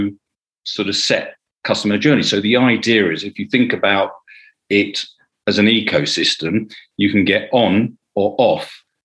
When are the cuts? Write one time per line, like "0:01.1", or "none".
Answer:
none

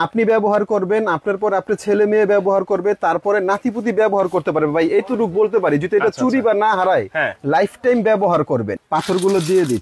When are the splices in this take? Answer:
0:08.8

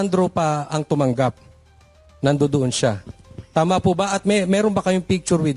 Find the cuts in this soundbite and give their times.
none

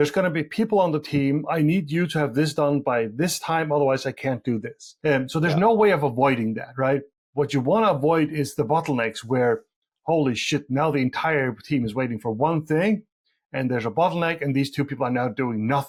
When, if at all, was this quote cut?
none

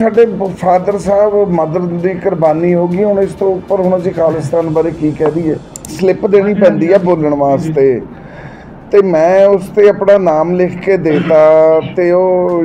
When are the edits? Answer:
0:05.8

